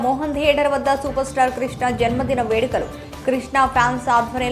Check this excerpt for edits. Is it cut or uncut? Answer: uncut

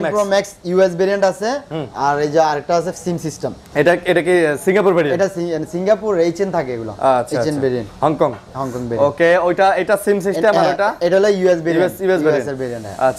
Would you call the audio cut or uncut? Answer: uncut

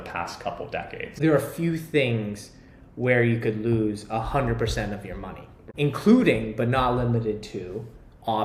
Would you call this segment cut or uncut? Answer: cut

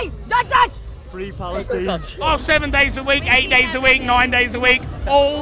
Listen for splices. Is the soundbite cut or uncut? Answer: cut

